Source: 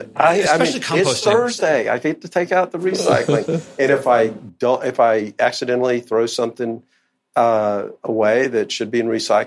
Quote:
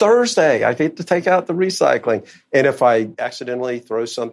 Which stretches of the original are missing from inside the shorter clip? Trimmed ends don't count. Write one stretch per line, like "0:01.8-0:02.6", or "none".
0:04.4-0:05.4